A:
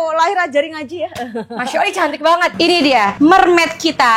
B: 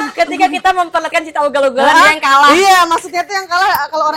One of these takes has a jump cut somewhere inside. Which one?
A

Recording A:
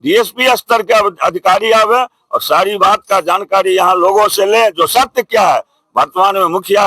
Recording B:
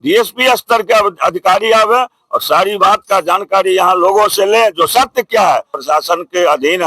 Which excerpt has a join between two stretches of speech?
B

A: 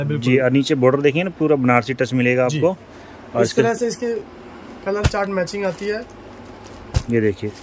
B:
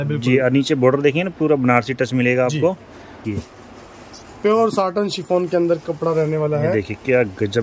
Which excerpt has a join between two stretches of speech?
B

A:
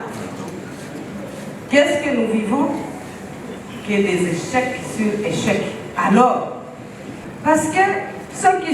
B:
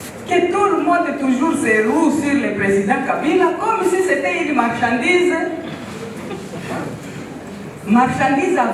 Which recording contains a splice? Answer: A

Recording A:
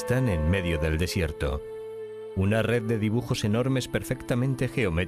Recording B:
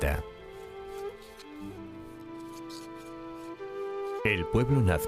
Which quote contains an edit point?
A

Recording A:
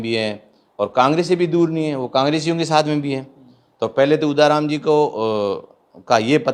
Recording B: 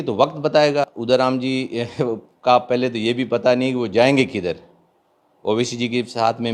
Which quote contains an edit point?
B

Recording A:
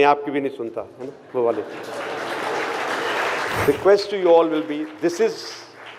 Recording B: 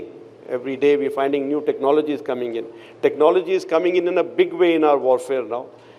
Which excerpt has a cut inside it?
A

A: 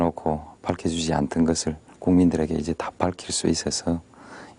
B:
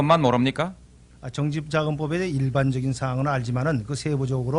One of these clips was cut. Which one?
A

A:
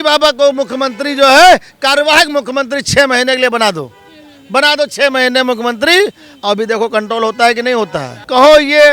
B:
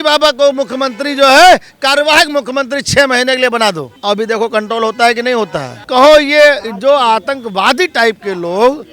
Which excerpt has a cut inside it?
B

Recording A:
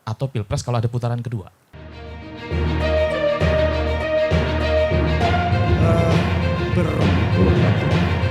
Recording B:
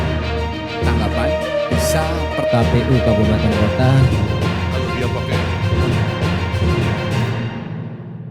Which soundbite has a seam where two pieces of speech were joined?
A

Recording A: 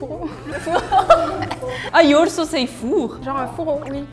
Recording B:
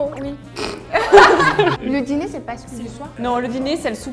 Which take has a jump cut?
B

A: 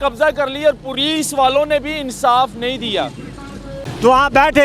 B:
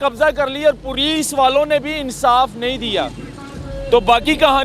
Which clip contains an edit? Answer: A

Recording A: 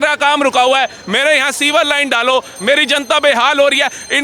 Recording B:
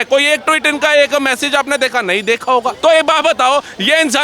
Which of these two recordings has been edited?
B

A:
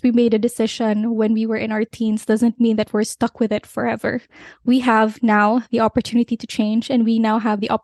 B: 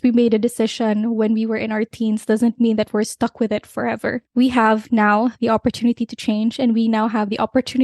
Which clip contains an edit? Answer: B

